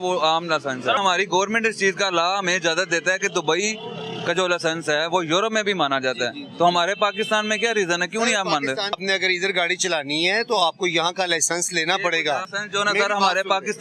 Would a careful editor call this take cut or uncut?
cut